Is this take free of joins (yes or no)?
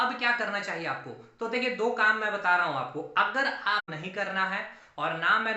no